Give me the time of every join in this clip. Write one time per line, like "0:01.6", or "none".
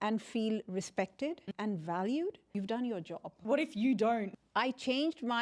0:01.4
0:02.5
0:03.4
0:04.4